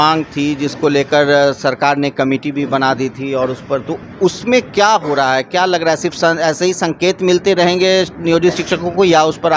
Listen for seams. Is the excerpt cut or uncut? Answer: uncut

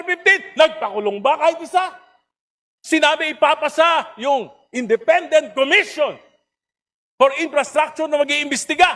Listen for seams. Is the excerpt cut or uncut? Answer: uncut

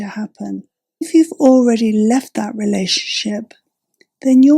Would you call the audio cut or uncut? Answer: cut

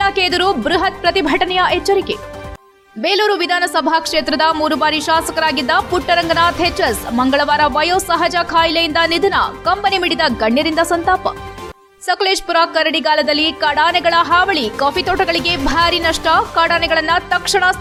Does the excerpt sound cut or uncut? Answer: uncut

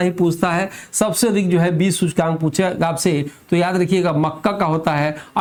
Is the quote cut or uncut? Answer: uncut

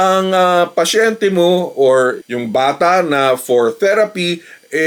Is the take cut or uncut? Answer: uncut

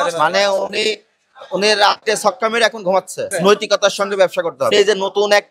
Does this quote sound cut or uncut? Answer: cut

